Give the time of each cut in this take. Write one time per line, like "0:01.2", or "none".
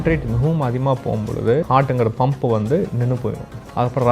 0:01.7